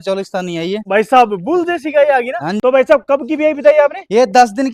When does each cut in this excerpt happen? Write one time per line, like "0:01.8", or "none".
0:00.8
0:02.5